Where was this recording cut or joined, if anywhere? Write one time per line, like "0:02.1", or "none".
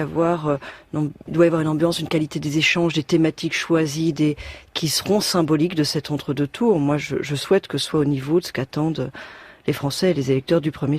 0:04.1